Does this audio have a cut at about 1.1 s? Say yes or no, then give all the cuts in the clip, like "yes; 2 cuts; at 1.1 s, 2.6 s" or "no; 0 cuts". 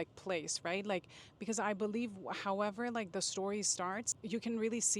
no; 1 cut; at 4.1 s